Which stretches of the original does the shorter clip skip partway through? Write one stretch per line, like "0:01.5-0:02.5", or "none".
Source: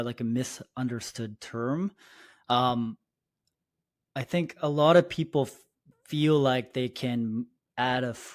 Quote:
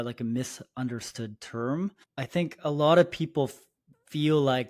0:02.0-0:04.0